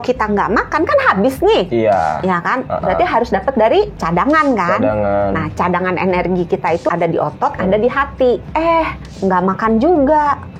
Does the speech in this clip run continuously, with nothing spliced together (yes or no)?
no